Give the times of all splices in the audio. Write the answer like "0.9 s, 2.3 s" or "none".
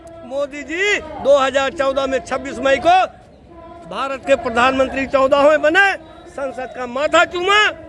none